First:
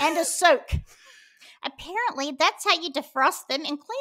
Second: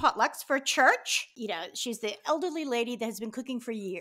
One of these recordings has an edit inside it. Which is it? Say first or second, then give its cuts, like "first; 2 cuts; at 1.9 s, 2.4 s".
second; 1 cut; at 1.3 s